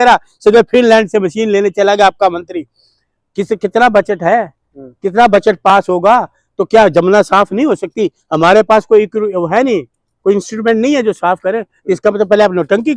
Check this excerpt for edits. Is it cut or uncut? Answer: uncut